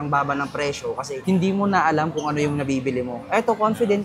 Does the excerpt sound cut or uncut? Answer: uncut